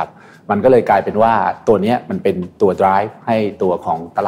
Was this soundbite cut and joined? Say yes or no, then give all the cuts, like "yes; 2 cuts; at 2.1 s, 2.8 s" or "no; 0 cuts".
no; 0 cuts